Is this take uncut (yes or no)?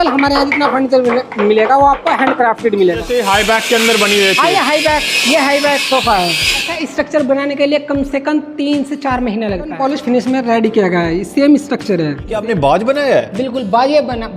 no